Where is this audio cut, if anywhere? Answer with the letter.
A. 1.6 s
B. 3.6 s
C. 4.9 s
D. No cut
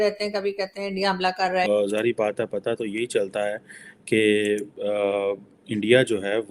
A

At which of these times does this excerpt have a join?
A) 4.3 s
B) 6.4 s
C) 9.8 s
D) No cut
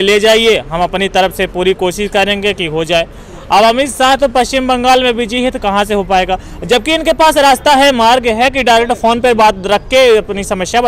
D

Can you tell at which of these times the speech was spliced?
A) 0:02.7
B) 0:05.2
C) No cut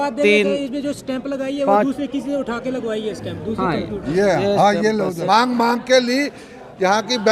B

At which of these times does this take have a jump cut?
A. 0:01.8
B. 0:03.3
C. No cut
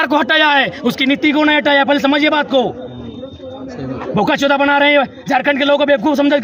C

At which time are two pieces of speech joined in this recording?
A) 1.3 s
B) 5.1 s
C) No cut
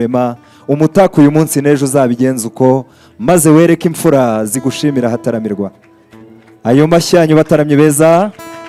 C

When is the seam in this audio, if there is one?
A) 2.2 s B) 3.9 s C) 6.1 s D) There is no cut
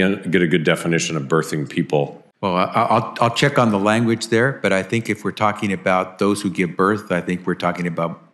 A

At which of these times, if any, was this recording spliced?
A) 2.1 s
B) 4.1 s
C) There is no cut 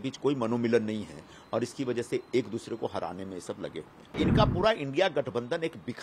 B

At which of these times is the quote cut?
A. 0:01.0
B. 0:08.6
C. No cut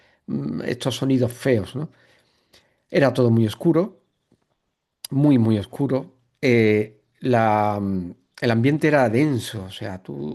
C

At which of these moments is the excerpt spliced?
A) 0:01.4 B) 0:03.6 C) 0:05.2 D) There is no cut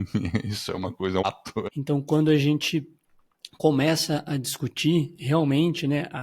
A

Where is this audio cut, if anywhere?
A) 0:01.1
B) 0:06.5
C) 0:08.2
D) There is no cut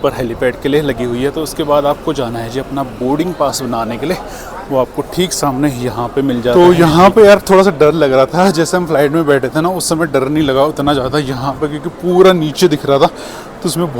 B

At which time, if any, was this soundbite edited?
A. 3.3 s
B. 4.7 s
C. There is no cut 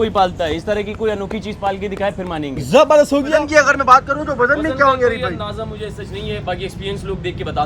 A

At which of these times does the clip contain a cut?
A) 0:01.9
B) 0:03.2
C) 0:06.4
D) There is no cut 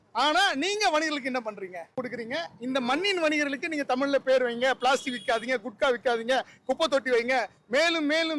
A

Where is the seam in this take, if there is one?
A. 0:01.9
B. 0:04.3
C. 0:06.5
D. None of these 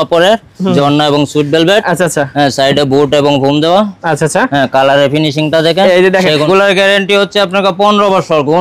C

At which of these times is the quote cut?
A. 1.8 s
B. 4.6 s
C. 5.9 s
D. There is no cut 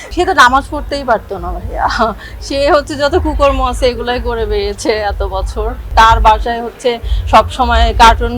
C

